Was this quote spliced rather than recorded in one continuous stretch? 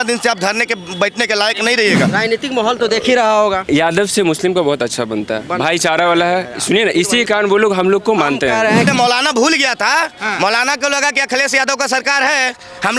yes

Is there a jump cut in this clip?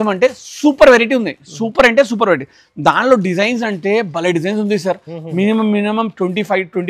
no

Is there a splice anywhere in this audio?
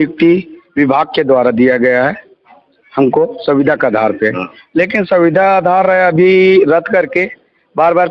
no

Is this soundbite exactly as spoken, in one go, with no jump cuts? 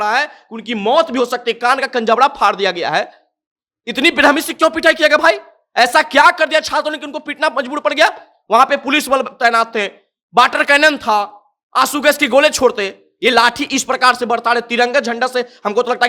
yes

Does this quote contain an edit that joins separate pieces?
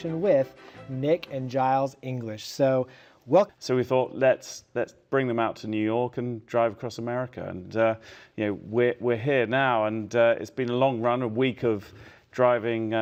no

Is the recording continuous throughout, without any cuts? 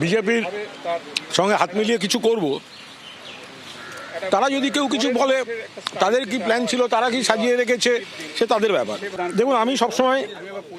no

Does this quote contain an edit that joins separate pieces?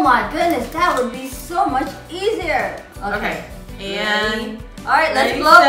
yes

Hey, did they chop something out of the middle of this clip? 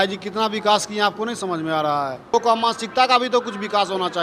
yes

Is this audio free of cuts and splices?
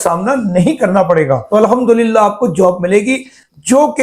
no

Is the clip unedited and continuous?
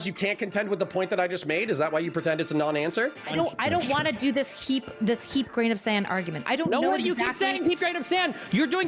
no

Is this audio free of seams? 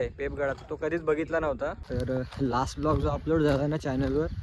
no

